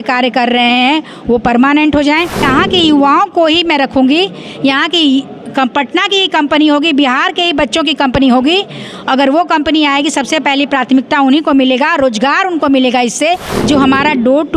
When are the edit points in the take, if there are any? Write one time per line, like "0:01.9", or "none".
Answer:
0:02.4
0:13.6